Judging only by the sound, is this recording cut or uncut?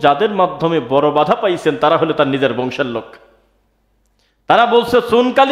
uncut